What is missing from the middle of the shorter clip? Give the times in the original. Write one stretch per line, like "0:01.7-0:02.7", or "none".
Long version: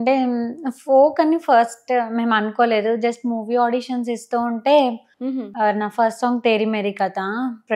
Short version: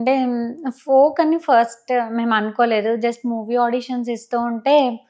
none